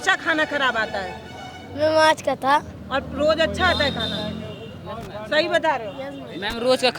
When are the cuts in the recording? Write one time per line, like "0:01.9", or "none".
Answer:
none